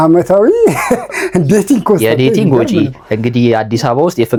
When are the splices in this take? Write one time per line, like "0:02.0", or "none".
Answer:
none